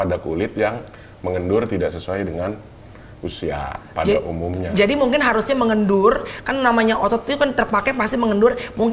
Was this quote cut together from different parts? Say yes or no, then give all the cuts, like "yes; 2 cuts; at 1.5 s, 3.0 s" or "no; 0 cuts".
no; 0 cuts